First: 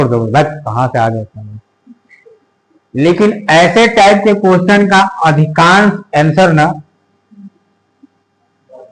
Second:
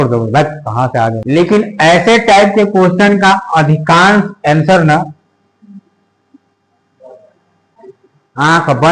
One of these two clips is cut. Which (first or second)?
second